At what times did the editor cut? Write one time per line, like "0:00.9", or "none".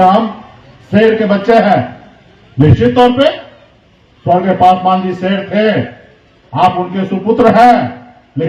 none